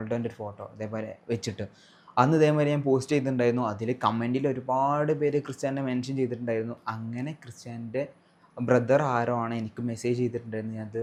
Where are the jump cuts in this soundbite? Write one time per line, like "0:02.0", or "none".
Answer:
none